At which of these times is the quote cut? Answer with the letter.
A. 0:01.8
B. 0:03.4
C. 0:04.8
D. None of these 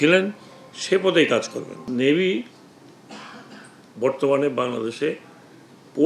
A